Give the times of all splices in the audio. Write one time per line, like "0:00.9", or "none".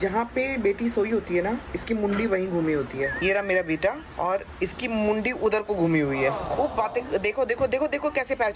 0:03.1
0:06.4